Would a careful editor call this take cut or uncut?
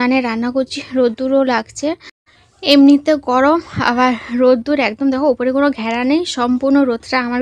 uncut